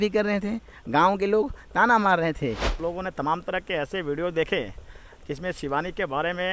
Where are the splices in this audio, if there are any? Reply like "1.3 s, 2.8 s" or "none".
2.7 s